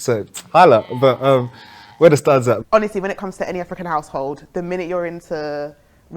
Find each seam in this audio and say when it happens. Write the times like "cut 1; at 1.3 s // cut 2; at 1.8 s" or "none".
cut 1; at 2.6 s